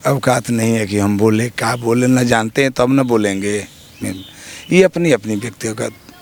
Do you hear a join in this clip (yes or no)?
no